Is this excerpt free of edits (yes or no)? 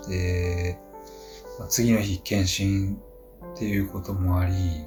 yes